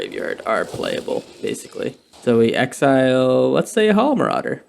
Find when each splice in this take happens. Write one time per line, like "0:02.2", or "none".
0:02.1